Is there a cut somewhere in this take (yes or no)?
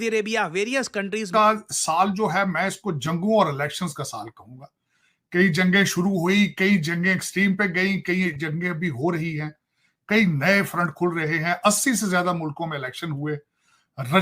yes